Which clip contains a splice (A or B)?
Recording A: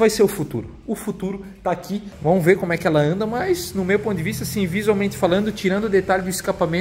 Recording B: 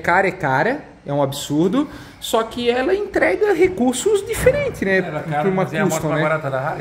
A